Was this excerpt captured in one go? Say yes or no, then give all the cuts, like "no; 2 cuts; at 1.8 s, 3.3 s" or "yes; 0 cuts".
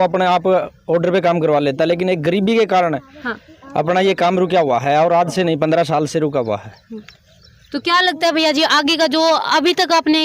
yes; 0 cuts